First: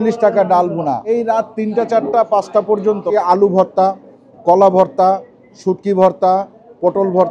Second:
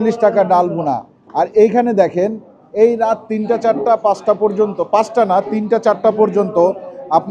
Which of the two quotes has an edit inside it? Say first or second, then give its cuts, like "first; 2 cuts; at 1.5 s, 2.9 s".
first; 2 cuts; at 1.0 s, 3.1 s